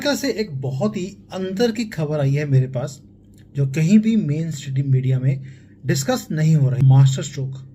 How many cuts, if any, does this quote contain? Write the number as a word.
one